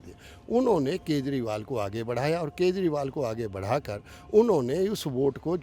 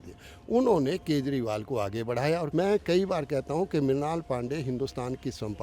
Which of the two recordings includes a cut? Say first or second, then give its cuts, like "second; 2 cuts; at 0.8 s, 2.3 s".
second; 1 cut; at 2.5 s